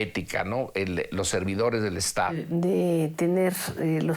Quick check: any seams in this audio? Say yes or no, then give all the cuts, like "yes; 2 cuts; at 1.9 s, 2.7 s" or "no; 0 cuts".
yes; 1 cut; at 2.4 s